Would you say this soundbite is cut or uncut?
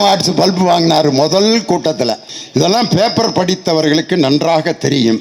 cut